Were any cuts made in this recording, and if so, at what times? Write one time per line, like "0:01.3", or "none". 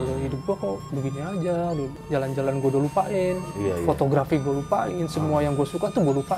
0:02.0